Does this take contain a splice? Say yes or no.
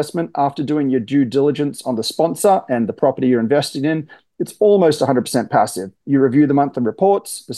no